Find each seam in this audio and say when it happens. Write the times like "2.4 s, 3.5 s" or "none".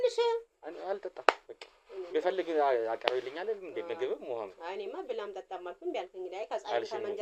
none